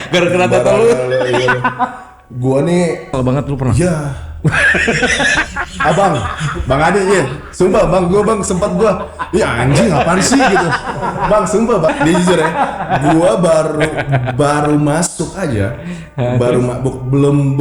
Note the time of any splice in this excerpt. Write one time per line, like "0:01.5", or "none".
0:03.1
0:11.9